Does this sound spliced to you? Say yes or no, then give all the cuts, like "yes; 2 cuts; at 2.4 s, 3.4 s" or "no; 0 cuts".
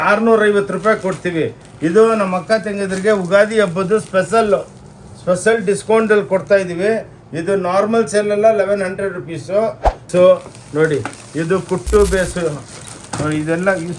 yes; 1 cut; at 10.1 s